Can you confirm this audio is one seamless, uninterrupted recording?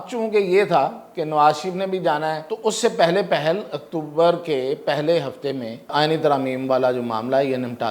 no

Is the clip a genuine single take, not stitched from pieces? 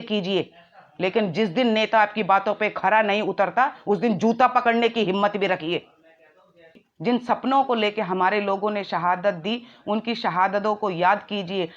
no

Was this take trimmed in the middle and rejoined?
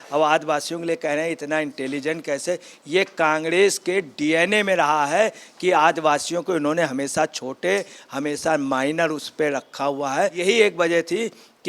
yes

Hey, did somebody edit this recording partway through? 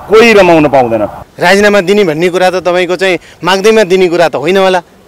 yes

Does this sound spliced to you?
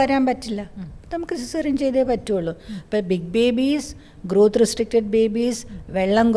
no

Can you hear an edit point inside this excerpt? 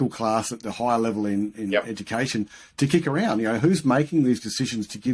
no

